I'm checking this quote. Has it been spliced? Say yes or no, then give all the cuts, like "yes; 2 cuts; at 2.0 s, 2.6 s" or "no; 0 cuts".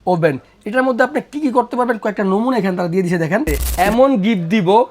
yes; 1 cut; at 3.6 s